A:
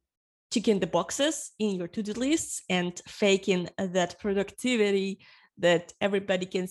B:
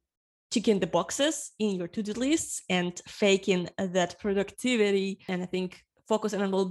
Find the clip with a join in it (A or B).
B